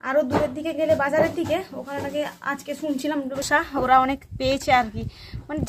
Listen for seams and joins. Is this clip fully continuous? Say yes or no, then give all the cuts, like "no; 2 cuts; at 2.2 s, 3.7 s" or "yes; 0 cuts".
no; 1 cut; at 3.4 s